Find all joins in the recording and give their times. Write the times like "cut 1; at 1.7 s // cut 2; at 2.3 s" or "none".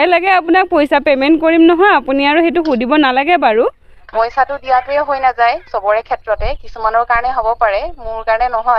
cut 1; at 4.1 s